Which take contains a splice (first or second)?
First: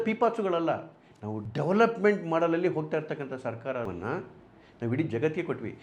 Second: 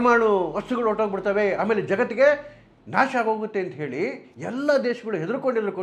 first